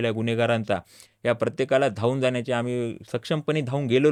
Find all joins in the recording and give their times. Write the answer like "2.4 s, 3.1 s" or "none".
none